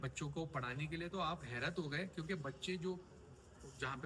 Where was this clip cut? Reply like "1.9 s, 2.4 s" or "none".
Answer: none